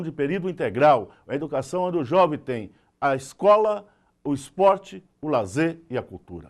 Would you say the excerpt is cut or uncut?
uncut